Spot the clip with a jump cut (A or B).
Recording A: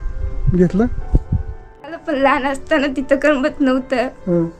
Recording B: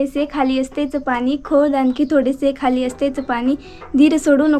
A